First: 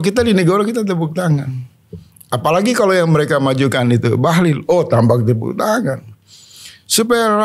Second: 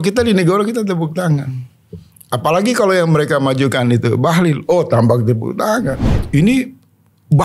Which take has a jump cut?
second; 1 cut; at 6.1 s

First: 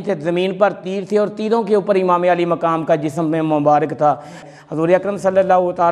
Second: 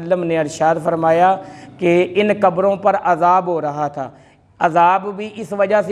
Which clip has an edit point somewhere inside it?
first; 1 cut; at 4.4 s

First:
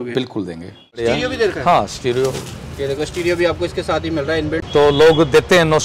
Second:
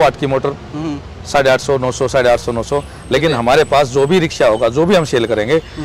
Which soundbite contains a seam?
first; 2 cuts; at 1.0 s, 4.6 s

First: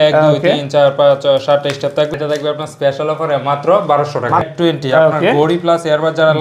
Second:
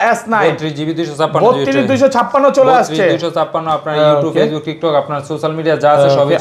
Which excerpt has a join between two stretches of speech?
first; 2 cuts; at 2.1 s, 4.5 s

